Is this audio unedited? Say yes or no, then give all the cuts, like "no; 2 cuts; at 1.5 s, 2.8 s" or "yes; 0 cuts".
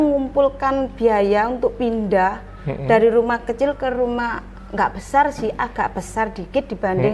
yes; 0 cuts